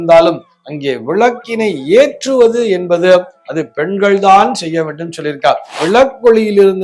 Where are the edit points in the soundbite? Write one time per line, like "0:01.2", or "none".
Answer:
0:05.8